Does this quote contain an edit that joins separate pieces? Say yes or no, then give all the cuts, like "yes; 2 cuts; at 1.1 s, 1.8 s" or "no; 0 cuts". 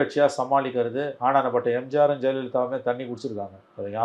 no; 0 cuts